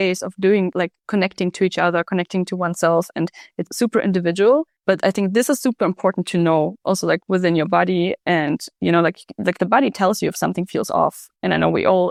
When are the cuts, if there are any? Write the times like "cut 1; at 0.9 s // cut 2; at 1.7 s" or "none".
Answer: none